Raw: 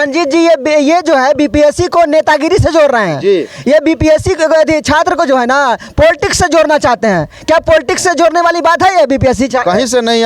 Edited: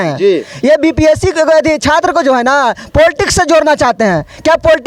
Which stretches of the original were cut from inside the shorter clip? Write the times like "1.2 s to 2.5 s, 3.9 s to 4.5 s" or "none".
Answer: none